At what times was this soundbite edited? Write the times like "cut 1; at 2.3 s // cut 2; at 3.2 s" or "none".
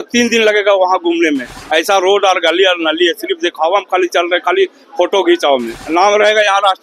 cut 1; at 5.7 s